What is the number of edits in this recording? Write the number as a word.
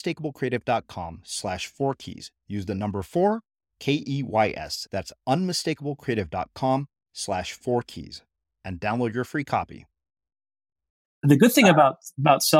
one